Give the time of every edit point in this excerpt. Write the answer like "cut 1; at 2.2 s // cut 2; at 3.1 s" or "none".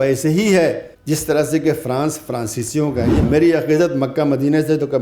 cut 1; at 0.9 s // cut 2; at 3.2 s